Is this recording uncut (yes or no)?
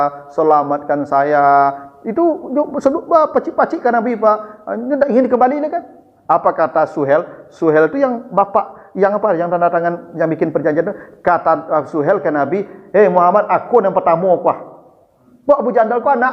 yes